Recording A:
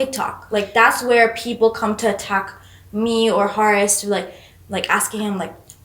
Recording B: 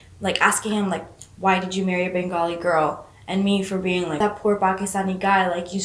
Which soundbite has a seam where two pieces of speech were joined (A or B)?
B